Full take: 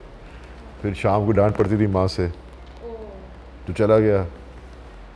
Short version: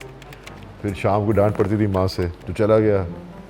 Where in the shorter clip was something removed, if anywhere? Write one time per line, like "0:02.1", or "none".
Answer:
0:02.4